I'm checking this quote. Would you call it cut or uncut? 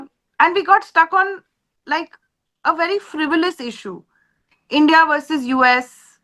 uncut